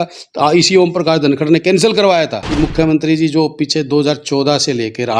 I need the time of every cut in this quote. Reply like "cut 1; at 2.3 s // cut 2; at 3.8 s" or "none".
cut 1; at 2.4 s